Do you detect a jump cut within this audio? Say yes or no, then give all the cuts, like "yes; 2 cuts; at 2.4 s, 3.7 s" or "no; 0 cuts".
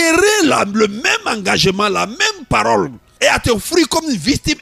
yes; 1 cut; at 3.0 s